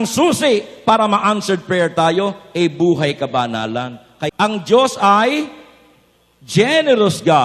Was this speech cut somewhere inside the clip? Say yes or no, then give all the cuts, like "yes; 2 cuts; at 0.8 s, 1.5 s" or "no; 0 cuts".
yes; 1 cut; at 4.1 s